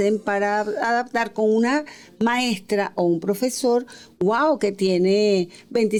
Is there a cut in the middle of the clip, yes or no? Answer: no